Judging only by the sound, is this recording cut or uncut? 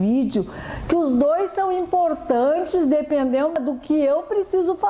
uncut